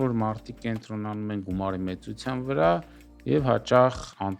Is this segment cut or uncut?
uncut